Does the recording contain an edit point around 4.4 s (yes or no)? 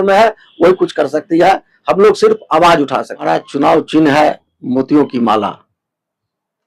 no